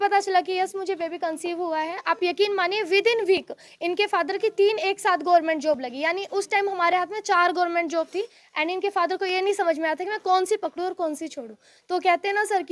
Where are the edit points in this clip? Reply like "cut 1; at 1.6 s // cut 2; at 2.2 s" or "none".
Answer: none

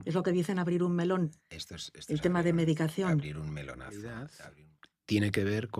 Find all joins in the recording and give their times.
cut 1; at 4.3 s

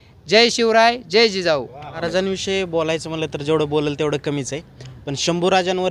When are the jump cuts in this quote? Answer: cut 1; at 2.0 s

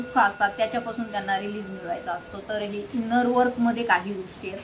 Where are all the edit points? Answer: none

